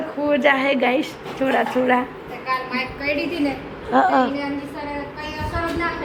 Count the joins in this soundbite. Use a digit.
0